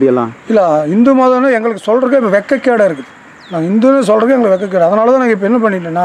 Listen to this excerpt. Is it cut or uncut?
uncut